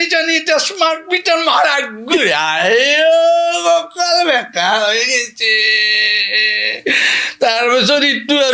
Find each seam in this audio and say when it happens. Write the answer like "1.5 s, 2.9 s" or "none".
none